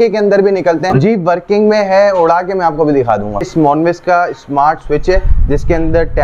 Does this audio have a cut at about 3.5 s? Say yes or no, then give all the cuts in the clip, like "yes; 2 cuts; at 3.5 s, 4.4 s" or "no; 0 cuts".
yes; 2 cuts; at 0.9 s, 3.5 s